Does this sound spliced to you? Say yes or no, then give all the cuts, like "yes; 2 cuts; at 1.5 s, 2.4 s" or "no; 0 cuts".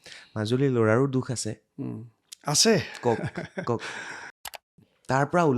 yes; 1 cut; at 4.6 s